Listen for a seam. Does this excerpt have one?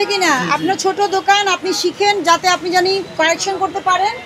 no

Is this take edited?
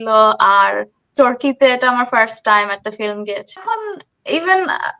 yes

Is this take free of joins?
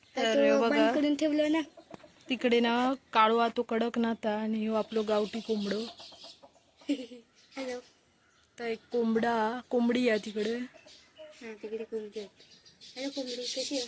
yes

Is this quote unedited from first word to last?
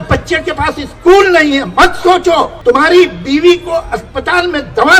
no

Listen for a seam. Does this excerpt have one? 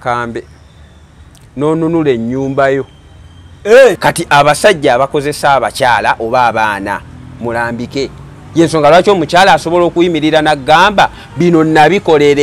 yes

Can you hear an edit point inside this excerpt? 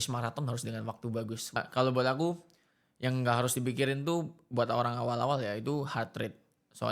yes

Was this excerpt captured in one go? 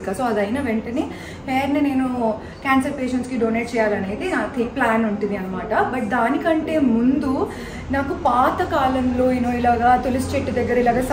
yes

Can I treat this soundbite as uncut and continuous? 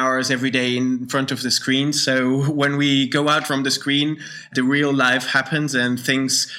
no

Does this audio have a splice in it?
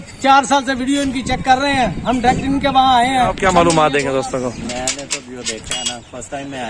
yes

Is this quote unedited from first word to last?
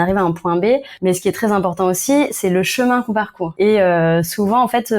no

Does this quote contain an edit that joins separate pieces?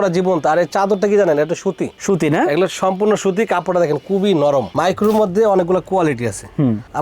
yes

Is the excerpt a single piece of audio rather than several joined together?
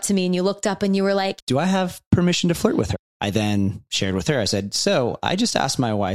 no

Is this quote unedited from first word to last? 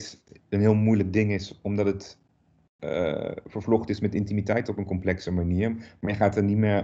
yes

